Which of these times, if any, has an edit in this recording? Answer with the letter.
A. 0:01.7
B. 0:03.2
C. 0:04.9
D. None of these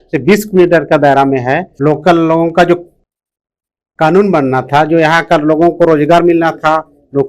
A